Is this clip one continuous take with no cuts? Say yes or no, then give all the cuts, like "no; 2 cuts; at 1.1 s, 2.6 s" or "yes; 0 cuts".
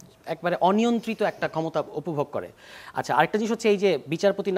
yes; 0 cuts